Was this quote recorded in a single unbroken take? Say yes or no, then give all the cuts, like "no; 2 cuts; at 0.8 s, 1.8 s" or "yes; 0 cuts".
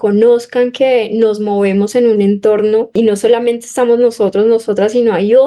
no; 1 cut; at 2.9 s